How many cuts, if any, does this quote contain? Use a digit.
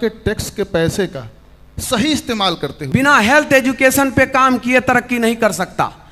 1